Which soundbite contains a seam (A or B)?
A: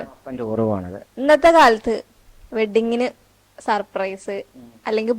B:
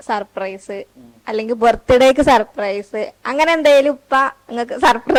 A